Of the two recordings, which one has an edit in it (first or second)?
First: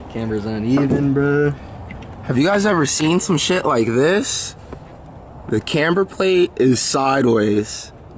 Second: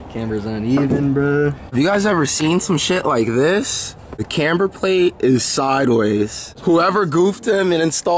second